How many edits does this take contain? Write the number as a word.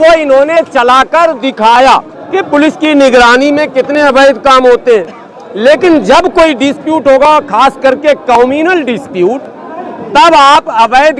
one